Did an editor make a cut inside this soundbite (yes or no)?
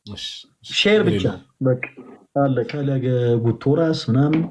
yes